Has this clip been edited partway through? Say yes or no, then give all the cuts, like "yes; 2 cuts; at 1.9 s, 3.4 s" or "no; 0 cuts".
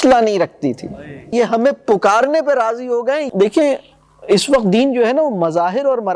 yes; 2 cuts; at 1.3 s, 3.3 s